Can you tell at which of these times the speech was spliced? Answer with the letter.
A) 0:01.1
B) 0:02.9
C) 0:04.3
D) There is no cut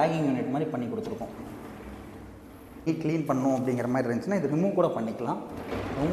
B